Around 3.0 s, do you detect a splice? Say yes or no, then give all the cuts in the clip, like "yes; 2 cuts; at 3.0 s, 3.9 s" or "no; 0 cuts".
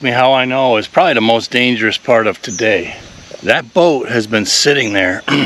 no; 0 cuts